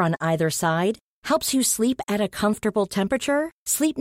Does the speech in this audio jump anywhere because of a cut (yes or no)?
no